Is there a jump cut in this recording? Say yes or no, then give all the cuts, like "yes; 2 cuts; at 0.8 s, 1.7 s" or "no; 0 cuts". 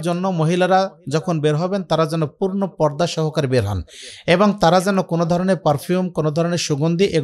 no; 0 cuts